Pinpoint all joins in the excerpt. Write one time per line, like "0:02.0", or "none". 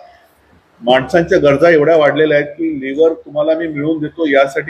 none

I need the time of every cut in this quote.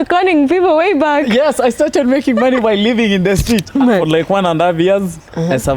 0:03.7

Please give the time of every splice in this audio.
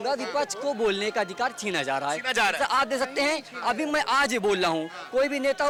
none

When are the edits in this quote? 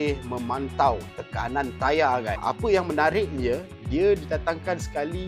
0:02.4

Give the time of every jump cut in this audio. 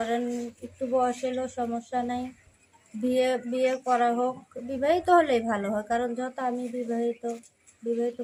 none

